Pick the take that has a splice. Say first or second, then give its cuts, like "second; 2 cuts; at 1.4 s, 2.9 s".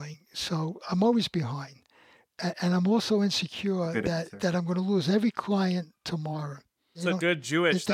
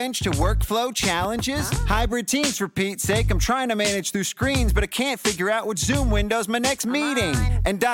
first; 1 cut; at 6.9 s